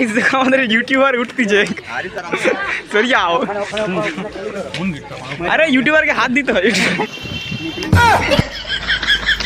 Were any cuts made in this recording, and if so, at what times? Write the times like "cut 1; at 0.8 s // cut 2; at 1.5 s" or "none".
cut 1; at 7.0 s